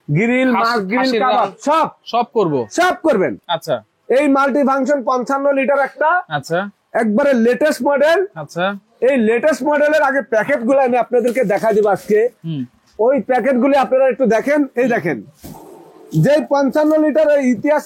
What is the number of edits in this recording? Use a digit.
0